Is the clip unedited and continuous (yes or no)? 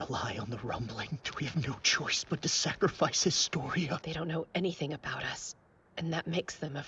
no